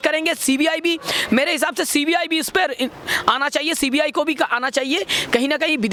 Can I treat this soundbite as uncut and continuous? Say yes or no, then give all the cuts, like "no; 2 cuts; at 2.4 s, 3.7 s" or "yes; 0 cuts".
yes; 0 cuts